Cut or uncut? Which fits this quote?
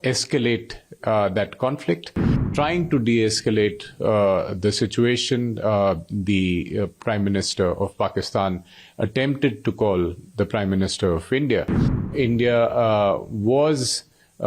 cut